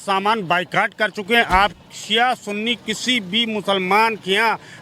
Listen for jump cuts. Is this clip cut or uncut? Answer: uncut